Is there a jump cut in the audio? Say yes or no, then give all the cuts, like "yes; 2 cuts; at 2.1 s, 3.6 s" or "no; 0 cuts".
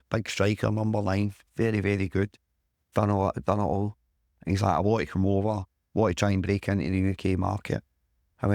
no; 0 cuts